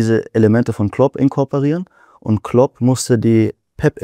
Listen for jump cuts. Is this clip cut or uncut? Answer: uncut